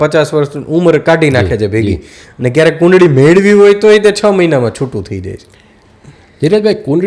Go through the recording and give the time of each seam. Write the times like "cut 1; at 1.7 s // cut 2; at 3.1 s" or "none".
none